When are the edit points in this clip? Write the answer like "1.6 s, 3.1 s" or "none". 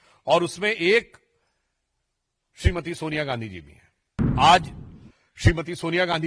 4.3 s